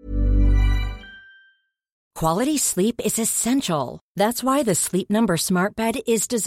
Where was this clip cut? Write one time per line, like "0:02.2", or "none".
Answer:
0:01.9